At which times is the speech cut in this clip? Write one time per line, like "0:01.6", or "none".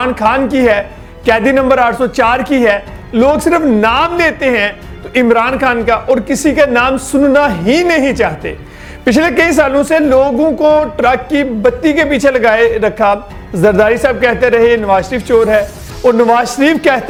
none

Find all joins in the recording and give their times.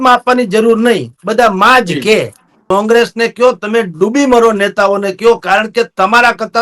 0:02.6

